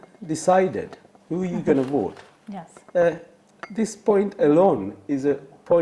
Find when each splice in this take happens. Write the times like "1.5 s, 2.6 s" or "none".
none

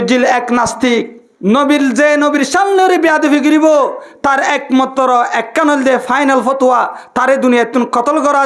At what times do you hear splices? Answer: 1.2 s

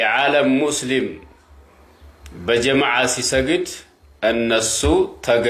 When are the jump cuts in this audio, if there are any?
none

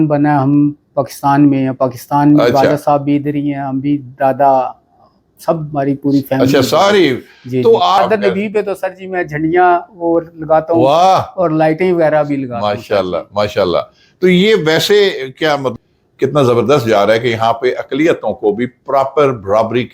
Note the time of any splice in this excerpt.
8.0 s, 15.7 s

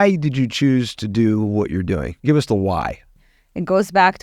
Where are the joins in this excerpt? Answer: 2.1 s, 3.2 s

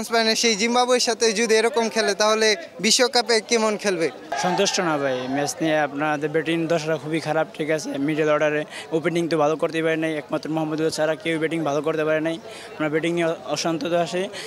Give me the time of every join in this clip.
4.2 s

